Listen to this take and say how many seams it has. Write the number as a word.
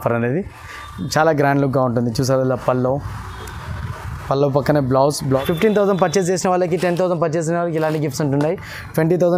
one